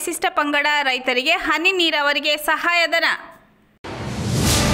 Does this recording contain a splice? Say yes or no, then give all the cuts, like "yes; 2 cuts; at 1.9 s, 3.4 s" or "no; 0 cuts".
no; 0 cuts